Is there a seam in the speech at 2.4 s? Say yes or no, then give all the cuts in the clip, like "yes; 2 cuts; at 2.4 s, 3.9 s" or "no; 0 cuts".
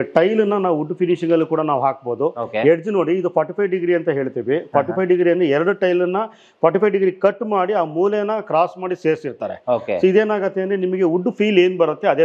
no; 0 cuts